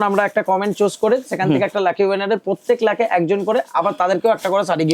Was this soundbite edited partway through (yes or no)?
no